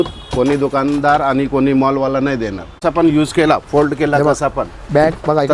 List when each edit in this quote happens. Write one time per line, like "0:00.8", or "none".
0:02.8